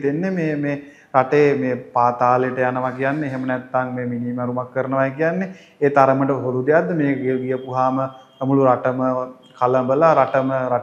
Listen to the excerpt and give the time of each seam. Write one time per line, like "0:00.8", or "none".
none